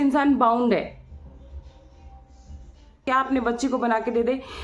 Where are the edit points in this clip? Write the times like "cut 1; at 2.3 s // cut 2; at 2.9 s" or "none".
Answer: cut 1; at 3.0 s

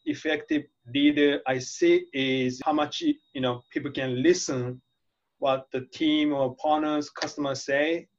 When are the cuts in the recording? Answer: none

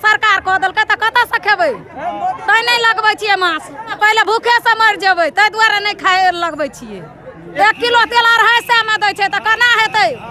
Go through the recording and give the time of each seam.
cut 1; at 3.9 s // cut 2; at 7.5 s

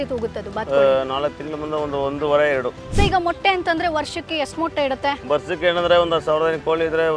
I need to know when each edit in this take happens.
cut 1; at 2.8 s

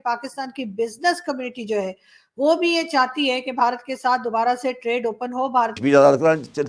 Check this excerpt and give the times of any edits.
cut 1; at 5.8 s

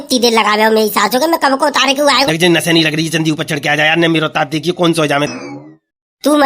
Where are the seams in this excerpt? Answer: cut 1; at 2.3 s // cut 2; at 5.3 s

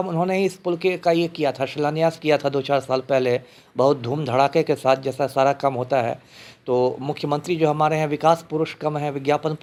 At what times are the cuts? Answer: none

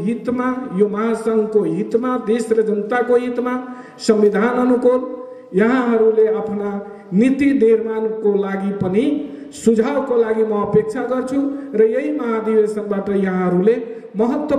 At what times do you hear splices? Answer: none

